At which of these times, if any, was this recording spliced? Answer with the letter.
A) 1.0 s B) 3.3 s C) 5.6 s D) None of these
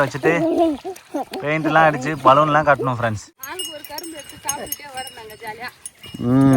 B